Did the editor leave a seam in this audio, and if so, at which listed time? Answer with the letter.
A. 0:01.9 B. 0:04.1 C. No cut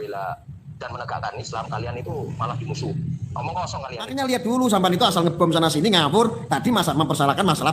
B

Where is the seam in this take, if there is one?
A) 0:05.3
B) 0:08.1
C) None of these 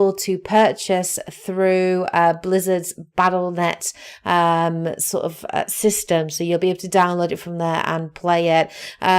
B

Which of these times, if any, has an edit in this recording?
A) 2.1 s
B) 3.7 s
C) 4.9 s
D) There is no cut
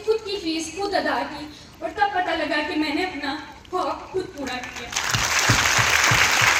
D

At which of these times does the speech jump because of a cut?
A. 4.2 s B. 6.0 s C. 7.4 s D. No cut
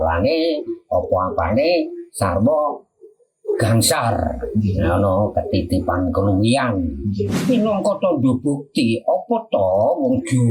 C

